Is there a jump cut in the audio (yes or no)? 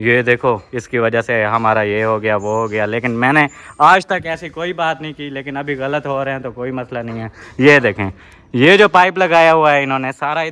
no